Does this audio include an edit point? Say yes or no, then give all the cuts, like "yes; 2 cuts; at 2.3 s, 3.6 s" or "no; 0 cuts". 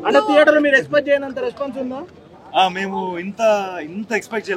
no; 0 cuts